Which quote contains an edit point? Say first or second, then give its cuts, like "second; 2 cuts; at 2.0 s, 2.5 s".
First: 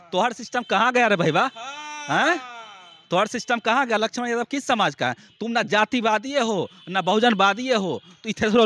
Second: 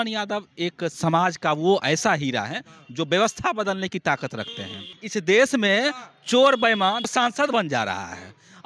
second; 3 cuts; at 1.0 s, 5.0 s, 7.0 s